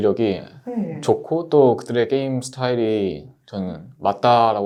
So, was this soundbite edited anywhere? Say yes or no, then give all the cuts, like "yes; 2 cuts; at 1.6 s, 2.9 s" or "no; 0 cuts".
no; 0 cuts